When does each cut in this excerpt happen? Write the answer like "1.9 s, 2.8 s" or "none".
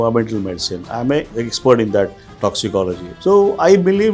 1.3 s, 3.1 s